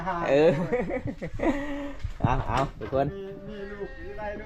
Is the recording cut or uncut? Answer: uncut